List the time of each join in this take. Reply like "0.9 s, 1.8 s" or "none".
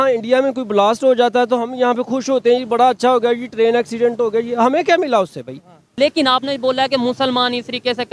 5.9 s

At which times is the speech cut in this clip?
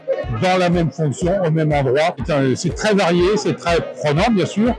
none

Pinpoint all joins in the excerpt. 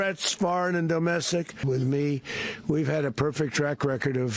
1.6 s

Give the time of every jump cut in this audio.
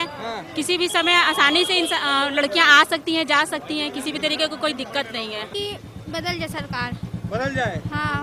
5.5 s

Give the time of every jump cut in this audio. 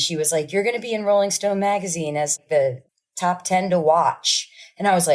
none

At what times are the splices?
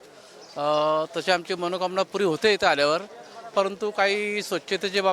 none

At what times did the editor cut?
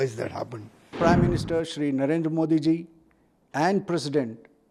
1.0 s

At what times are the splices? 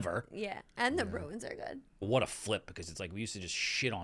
2.1 s

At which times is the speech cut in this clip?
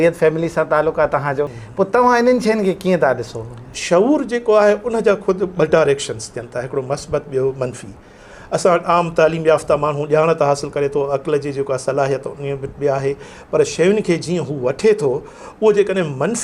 1.6 s, 3.7 s

